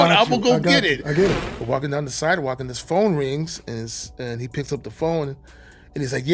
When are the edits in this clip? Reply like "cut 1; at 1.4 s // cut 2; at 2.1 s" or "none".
cut 1; at 1.5 s